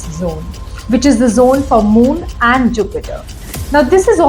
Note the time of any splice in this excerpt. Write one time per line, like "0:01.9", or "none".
none